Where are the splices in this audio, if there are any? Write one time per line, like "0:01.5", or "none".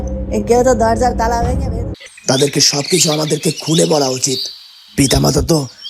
0:01.9